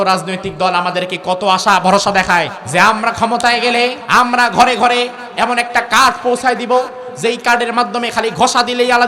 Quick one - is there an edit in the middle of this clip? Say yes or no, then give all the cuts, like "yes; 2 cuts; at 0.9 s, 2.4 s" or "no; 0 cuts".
yes; 2 cuts; at 2.6 s, 4.0 s